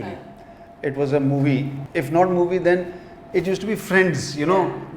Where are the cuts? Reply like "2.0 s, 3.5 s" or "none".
1.8 s